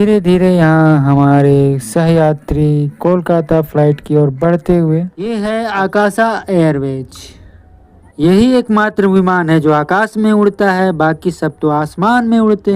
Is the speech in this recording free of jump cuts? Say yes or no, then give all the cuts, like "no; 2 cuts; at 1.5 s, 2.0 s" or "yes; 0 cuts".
no; 1 cut; at 5.3 s